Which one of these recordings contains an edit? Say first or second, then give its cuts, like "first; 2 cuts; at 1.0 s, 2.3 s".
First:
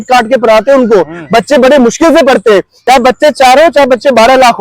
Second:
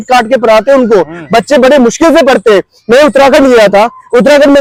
first; 1 cut; at 2.7 s